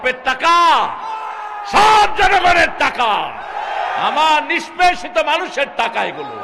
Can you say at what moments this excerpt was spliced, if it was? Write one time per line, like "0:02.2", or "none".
none